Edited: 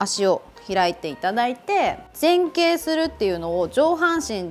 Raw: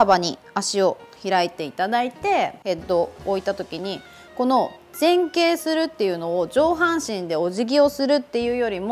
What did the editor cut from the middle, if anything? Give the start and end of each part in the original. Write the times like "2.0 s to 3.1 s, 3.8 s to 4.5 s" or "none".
2.6 s to 4.8 s